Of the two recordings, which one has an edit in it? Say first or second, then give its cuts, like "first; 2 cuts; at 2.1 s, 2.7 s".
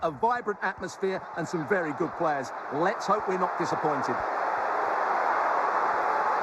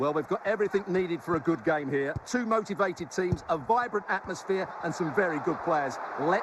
first; 1 cut; at 4.0 s